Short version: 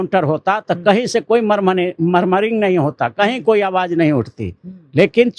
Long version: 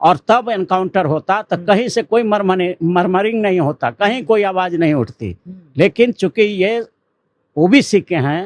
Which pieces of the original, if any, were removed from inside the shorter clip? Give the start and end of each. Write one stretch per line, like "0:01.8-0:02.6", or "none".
none